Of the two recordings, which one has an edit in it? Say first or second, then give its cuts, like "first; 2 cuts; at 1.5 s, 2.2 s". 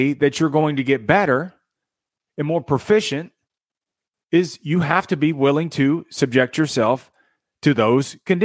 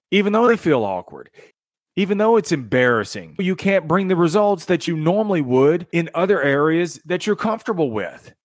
second; 3 cuts; at 1.5 s, 3.4 s, 5.9 s